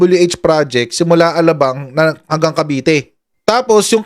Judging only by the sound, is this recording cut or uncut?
uncut